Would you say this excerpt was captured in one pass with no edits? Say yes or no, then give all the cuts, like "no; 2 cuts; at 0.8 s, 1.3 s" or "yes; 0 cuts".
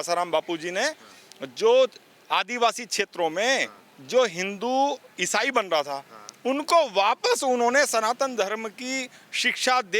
yes; 0 cuts